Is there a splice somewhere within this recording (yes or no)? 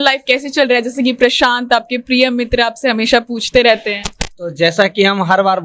no